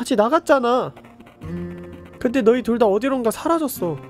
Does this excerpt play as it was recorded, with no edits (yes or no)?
yes